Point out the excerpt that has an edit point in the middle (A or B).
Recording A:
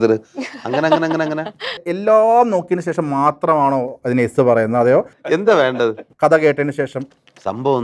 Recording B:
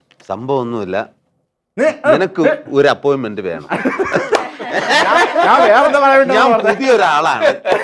A